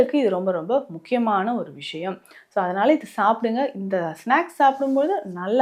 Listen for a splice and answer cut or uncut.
uncut